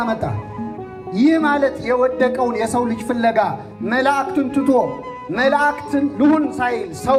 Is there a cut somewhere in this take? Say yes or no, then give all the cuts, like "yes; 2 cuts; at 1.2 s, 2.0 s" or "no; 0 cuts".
no; 0 cuts